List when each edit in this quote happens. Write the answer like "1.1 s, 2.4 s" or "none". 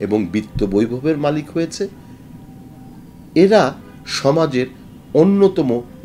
none